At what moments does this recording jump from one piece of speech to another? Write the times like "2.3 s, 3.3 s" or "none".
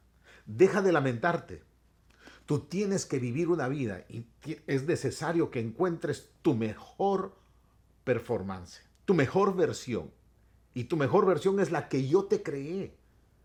none